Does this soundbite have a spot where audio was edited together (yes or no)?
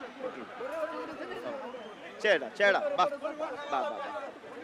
no